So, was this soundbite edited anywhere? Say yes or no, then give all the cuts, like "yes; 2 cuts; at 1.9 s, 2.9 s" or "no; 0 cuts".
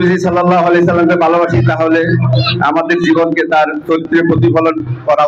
no; 0 cuts